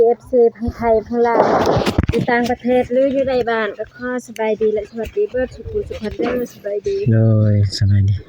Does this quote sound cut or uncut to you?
uncut